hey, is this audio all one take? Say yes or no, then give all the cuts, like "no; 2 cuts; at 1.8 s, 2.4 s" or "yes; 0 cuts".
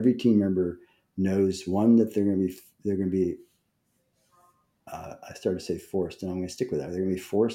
yes; 0 cuts